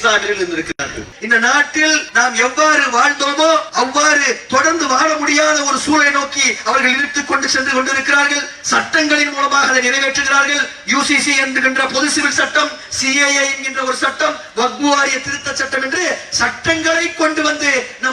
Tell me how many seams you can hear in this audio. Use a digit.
3